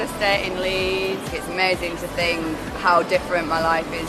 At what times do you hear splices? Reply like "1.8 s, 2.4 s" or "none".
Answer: 1.2 s